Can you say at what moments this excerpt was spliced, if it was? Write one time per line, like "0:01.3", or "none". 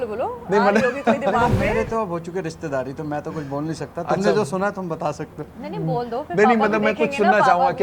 none

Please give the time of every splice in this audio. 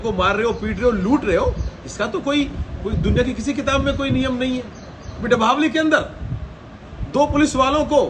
0:05.2

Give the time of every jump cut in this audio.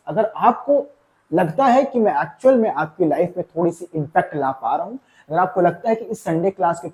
none

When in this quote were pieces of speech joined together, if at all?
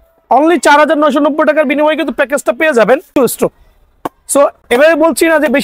0:03.1

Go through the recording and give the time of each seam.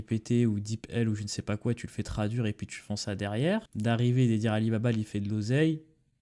0:03.7

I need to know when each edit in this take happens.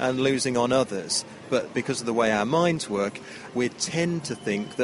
0:01.7
0:03.4

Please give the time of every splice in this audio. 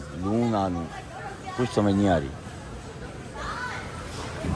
none

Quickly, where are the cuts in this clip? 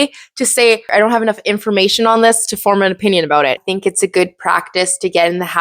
0:00.9
0:03.6

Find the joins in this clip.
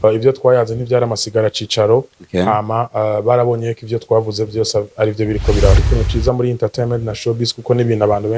0:05.9

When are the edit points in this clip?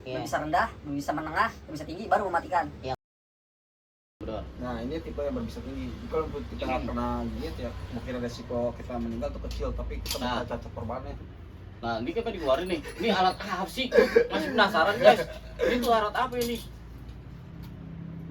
none

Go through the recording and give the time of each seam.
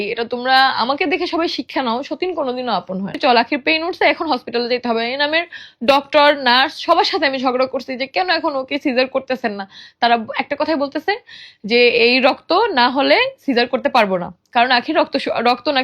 0:03.2

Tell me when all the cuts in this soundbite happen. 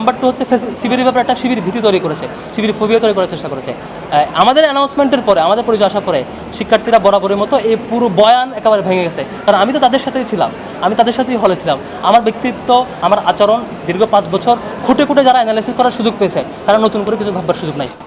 none

